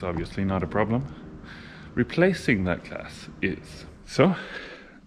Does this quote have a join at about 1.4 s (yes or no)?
no